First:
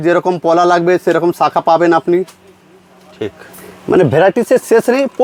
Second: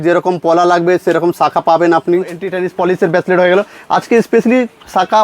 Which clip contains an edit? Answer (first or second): second